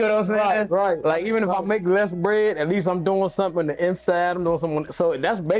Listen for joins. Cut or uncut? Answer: uncut